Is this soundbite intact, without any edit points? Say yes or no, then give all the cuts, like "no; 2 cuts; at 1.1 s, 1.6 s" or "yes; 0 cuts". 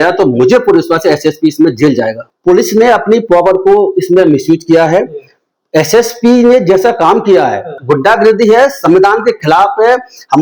no; 2 cuts; at 2.2 s, 7.7 s